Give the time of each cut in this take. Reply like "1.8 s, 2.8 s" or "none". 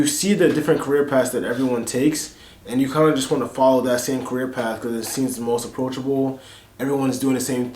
5.7 s